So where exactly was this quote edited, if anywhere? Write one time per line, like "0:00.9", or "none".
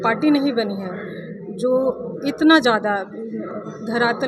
none